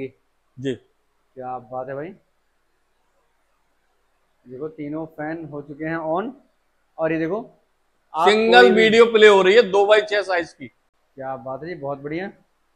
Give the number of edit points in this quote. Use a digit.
0